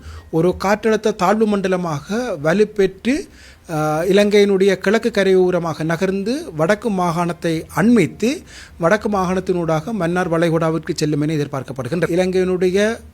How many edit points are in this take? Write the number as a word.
one